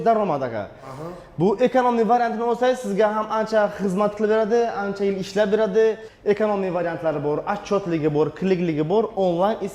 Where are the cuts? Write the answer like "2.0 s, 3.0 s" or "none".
6.1 s